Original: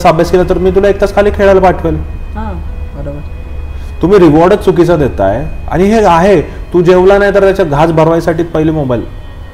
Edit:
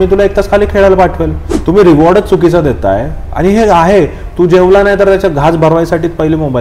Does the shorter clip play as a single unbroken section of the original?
no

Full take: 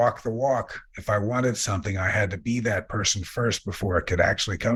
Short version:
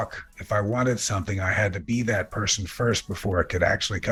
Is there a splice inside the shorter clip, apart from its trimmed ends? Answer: no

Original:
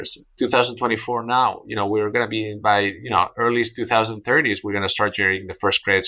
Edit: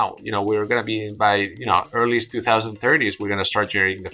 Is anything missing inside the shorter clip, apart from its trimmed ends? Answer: no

